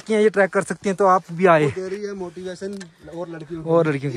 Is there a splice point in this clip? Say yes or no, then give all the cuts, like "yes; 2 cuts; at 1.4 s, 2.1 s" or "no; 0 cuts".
yes; 1 cut; at 1.7 s